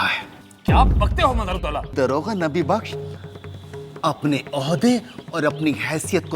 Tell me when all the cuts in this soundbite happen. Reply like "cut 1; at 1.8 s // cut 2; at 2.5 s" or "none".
cut 1; at 1.9 s